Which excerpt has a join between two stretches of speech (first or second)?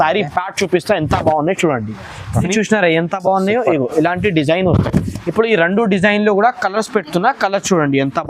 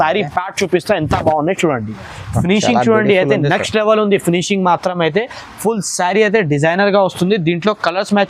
first